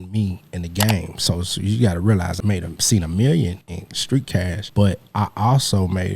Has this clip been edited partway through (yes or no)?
yes